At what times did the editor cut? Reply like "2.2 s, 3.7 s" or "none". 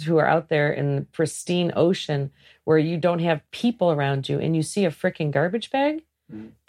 none